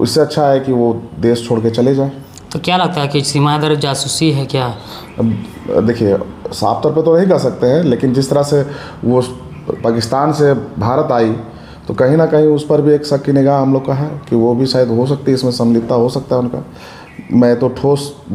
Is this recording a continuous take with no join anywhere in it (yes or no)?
yes